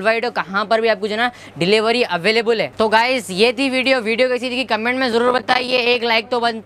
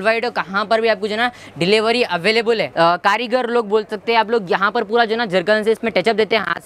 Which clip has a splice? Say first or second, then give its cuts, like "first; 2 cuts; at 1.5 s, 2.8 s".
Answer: second; 1 cut; at 2.7 s